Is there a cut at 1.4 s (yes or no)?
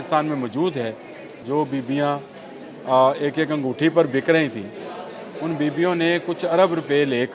yes